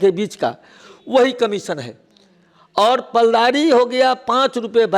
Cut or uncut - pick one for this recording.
uncut